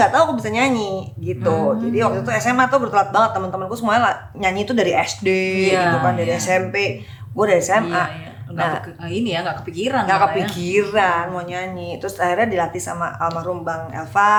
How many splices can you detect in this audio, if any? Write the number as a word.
zero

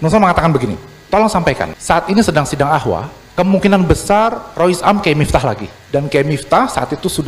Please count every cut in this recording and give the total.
five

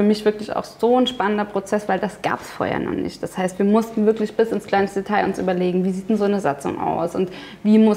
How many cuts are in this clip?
zero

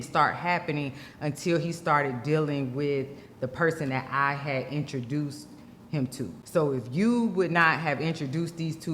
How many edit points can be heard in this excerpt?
one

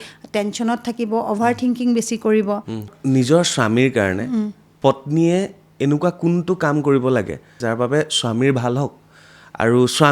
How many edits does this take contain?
three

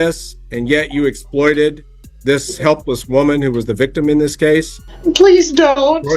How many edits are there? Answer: one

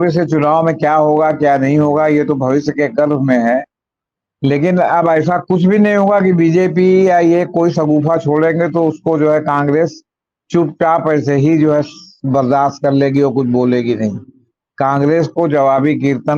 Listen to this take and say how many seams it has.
zero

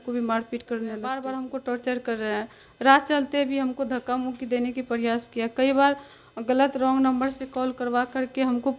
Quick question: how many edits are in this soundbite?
one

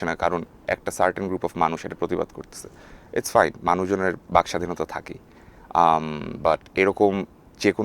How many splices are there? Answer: zero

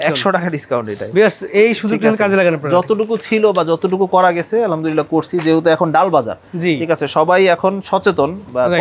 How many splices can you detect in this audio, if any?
zero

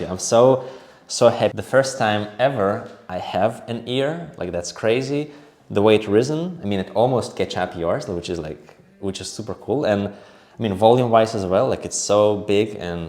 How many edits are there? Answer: one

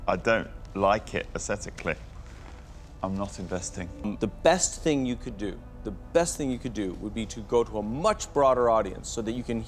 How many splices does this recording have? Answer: zero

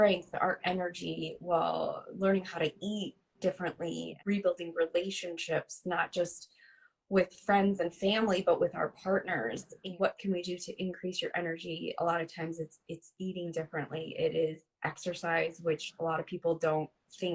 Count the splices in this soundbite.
two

